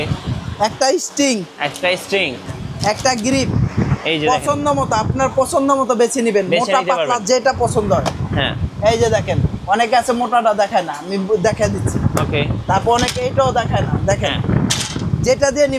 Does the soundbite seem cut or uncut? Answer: uncut